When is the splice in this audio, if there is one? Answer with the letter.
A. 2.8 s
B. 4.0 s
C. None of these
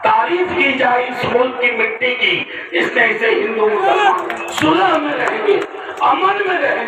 B